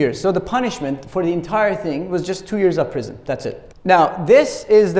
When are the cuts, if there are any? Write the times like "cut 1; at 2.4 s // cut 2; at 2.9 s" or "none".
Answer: cut 1; at 3.7 s